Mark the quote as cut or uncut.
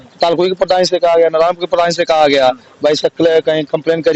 uncut